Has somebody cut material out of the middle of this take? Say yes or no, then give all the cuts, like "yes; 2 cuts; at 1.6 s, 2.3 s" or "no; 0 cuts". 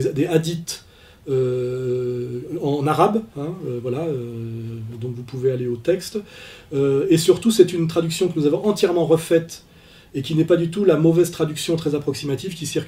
yes; 1 cut; at 2.0 s